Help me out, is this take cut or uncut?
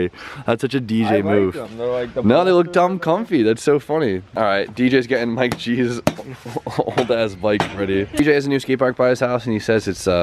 uncut